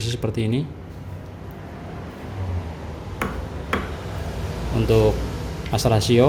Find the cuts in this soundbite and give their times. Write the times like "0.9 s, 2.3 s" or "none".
none